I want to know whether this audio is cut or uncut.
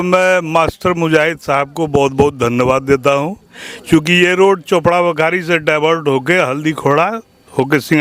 uncut